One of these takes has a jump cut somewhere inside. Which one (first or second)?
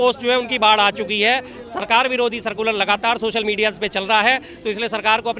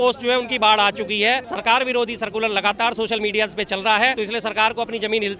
second